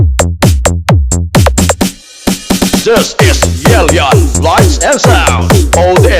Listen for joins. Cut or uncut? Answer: cut